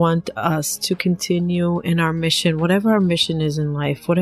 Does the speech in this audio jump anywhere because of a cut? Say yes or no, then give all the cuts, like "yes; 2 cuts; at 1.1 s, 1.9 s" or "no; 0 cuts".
no; 0 cuts